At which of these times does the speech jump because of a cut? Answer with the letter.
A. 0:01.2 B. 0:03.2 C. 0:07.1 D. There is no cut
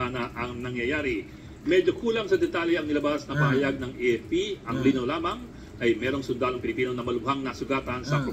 B